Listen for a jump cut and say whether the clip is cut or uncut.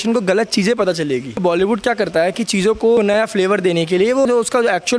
cut